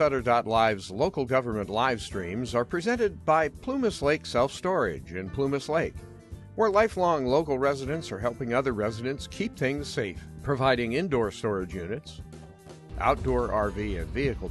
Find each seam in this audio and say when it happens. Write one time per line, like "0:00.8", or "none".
0:04.0